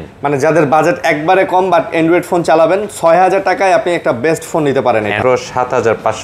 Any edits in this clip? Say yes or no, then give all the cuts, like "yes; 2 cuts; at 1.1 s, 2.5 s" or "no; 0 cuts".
yes; 1 cut; at 5.2 s